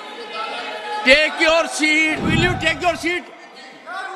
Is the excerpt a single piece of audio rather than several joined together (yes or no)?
no